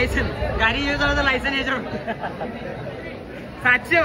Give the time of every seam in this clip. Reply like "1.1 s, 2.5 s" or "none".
none